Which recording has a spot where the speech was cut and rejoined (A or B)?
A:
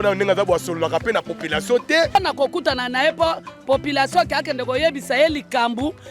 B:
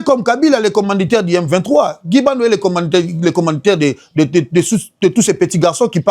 A